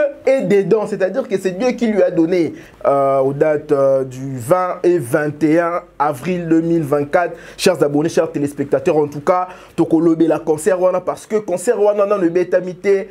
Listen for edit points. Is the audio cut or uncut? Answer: cut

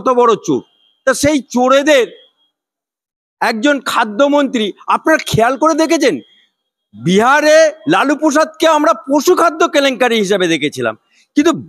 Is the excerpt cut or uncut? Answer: uncut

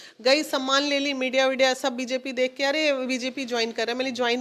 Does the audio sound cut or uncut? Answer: uncut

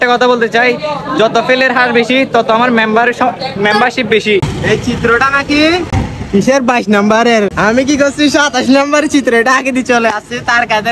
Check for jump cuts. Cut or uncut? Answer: cut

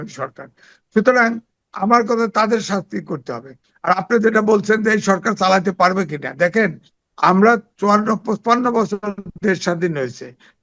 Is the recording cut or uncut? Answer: uncut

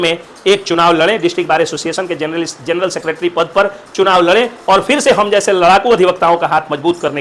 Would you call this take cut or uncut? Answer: uncut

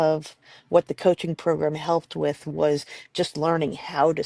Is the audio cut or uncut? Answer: uncut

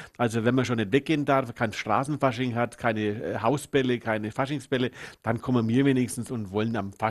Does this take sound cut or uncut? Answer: uncut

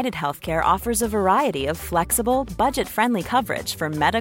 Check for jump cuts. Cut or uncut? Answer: uncut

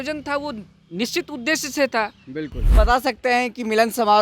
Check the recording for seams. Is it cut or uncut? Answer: cut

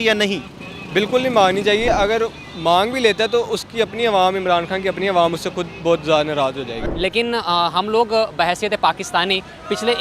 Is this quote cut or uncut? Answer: cut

